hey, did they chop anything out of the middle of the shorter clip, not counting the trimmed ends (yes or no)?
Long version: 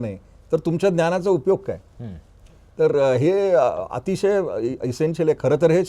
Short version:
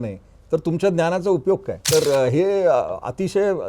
yes